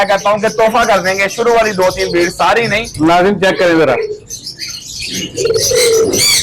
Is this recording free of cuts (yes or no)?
no